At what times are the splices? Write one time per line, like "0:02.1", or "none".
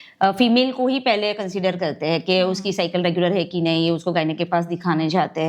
none